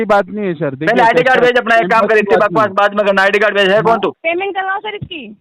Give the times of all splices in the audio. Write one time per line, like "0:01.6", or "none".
0:04.2